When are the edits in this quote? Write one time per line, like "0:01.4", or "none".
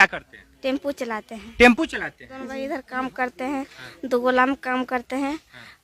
0:02.5